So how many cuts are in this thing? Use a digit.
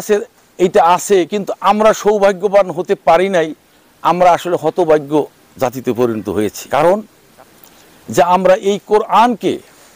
1